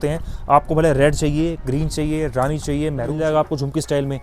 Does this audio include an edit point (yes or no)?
yes